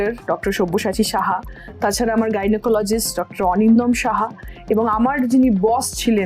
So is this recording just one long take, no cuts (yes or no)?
yes